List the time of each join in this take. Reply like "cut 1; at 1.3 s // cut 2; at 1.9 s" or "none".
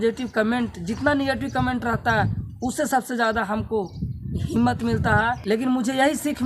cut 1; at 5.4 s